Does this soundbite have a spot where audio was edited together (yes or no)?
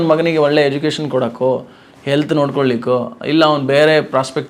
no